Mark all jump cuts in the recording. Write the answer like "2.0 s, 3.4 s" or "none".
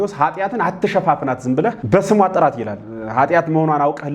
1.8 s